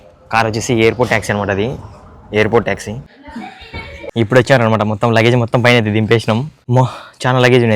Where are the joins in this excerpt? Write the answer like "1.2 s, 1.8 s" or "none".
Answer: 4.0 s, 6.6 s